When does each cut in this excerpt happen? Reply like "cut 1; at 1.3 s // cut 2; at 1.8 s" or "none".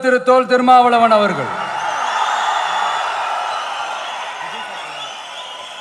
none